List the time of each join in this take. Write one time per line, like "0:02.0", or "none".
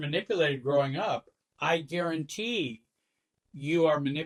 none